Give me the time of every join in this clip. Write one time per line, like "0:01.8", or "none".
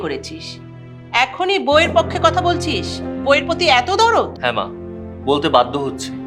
0:04.3